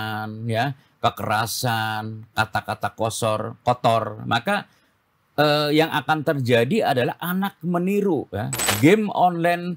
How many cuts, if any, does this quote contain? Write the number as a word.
one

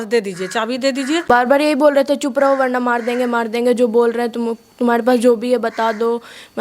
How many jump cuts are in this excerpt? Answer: one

